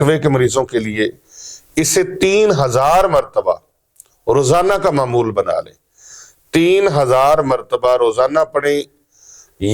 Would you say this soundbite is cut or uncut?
uncut